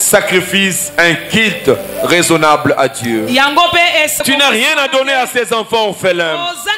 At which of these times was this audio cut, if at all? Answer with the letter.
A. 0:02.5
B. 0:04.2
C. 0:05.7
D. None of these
B